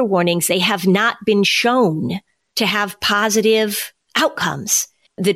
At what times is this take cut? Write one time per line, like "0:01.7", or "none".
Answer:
none